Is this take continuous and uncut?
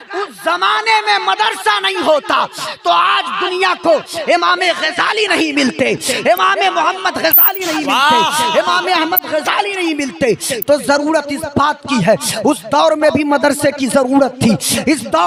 yes; 0 cuts

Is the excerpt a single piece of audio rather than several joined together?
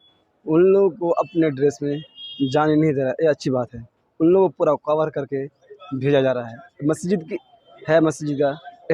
yes; 0 cuts

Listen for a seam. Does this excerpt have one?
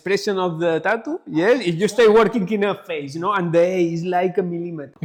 no; 0 cuts

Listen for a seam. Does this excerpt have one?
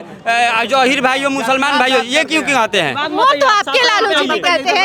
no; 0 cuts

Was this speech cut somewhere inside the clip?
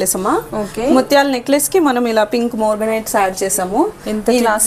no; 0 cuts

